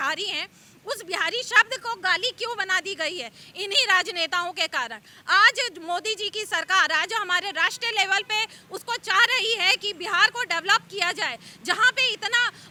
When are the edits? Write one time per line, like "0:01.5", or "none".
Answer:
none

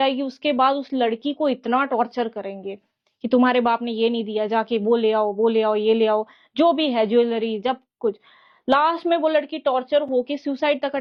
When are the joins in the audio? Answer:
none

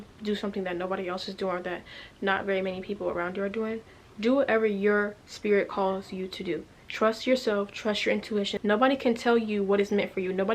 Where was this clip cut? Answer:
0:08.5

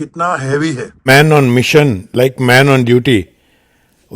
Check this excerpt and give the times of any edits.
0:01.1

